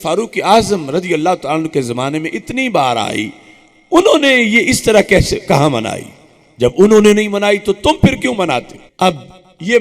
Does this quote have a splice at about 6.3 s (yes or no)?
no